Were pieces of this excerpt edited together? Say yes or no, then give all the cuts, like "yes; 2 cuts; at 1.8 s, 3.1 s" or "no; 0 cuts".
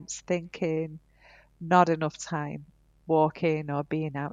no; 0 cuts